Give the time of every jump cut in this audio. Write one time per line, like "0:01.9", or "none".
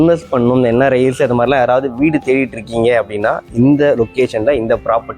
none

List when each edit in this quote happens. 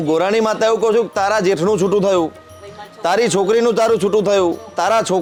none

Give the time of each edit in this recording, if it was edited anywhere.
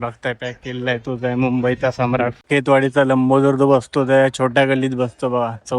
0:02.4

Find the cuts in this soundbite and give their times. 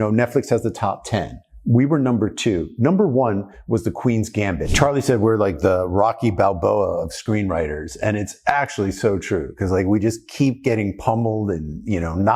0:04.7

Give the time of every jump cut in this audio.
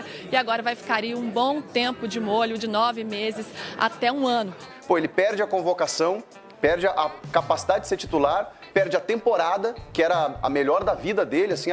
0:04.7

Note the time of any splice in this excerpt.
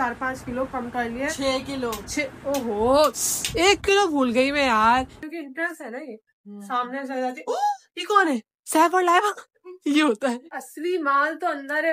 0:05.2
0:10.6

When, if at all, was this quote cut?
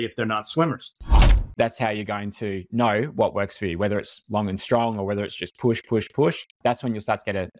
0:01.4
0:06.5

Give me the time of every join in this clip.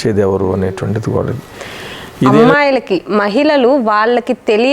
0:02.4

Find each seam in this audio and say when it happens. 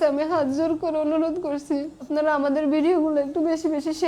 0:02.0

